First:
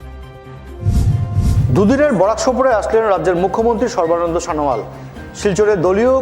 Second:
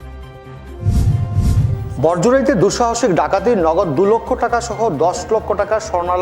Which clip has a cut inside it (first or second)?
first